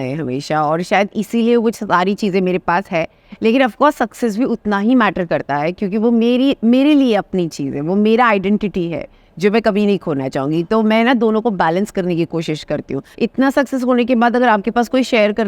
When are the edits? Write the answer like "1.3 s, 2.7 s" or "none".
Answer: 13.0 s